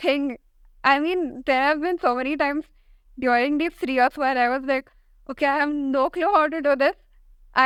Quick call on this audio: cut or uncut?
uncut